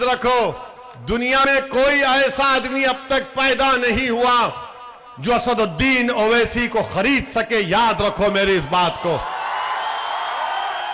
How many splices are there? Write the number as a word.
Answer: one